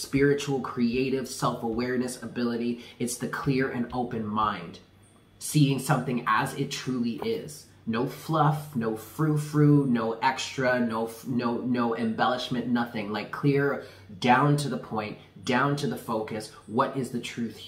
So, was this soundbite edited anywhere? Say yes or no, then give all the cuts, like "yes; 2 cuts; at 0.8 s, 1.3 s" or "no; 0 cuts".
no; 0 cuts